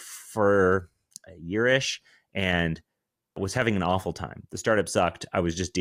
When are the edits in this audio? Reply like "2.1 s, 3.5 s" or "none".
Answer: none